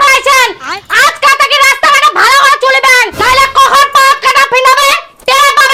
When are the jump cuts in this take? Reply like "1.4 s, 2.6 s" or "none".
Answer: none